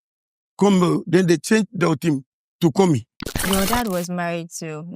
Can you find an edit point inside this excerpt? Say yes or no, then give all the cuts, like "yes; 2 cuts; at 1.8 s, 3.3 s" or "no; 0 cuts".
yes; 1 cut; at 3.4 s